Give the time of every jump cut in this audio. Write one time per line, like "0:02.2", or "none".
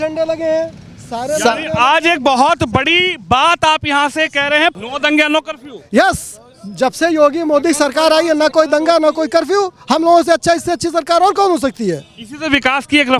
0:04.7